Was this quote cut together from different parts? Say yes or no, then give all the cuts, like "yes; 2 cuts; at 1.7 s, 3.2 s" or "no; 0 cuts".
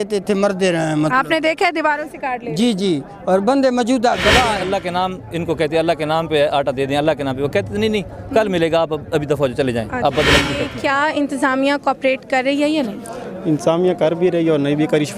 yes; 2 cuts; at 4.6 s, 10.6 s